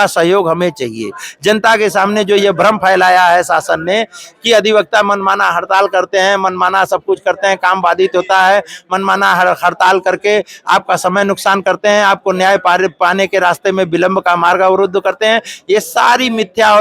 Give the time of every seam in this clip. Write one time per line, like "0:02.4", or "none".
none